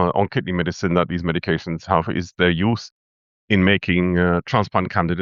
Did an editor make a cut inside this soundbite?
no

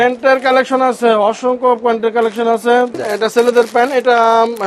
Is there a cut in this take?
yes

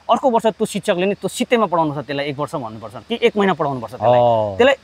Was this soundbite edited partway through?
no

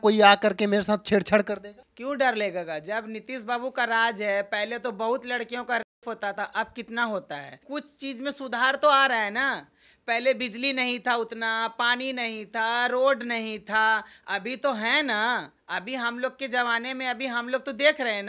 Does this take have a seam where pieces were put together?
no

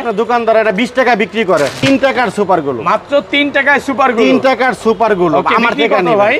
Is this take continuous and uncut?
no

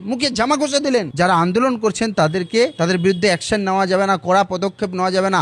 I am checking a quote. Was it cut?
yes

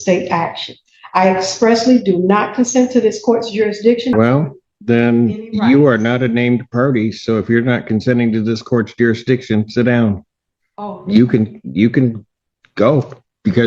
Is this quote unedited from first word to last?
no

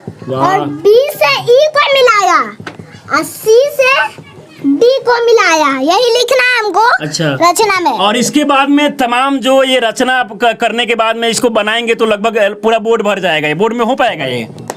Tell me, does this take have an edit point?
no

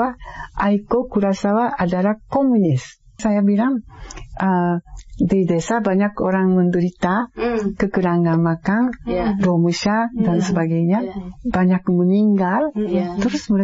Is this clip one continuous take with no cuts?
no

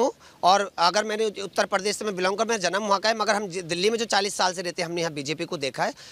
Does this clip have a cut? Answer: no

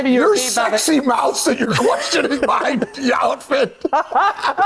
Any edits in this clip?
no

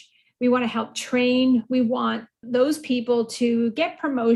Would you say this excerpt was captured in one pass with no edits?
yes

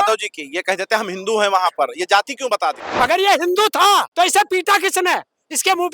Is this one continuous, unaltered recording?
no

